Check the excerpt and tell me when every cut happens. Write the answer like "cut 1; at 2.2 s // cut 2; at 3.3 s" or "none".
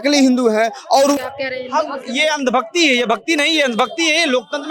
cut 1; at 1.2 s